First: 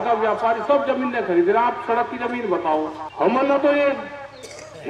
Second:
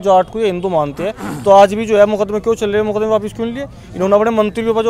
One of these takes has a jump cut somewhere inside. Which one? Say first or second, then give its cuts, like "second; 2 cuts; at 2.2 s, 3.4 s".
first; 1 cut; at 3.0 s